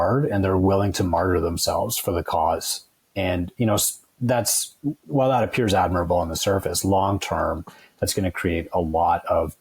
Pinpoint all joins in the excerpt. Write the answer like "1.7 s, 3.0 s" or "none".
none

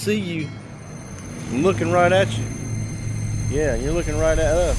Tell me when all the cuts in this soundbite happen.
none

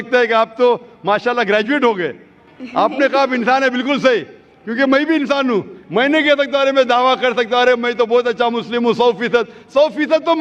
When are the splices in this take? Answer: none

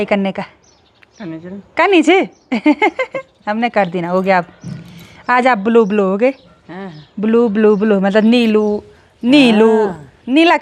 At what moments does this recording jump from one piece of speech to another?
none

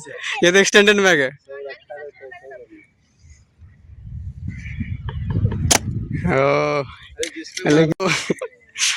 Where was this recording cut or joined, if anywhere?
none

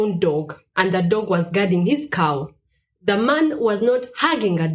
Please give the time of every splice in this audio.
none

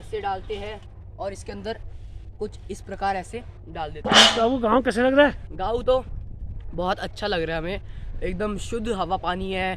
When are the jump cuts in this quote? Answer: none

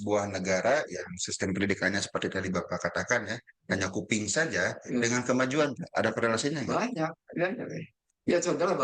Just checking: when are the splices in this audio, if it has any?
none

